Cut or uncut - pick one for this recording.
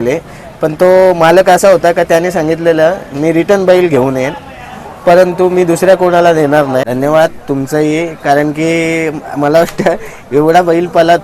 cut